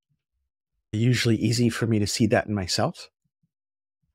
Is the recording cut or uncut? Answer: uncut